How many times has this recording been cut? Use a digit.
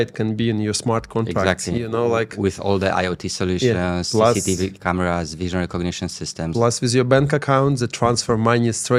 0